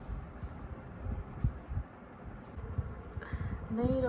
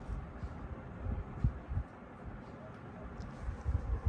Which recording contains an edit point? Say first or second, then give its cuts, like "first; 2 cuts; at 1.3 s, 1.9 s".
first; 1 cut; at 2.6 s